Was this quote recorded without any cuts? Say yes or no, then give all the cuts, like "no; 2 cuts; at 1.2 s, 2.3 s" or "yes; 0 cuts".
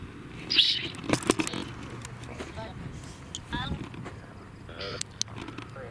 yes; 0 cuts